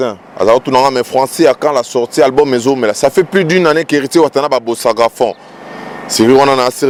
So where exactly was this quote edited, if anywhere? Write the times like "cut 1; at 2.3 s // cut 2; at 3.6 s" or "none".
none